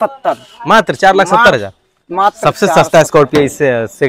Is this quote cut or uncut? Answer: uncut